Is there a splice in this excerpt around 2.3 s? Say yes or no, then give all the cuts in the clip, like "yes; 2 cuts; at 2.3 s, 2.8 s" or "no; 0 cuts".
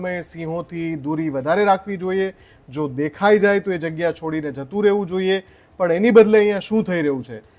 no; 0 cuts